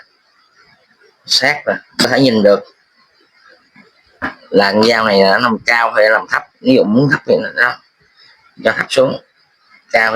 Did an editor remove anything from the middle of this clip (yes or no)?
yes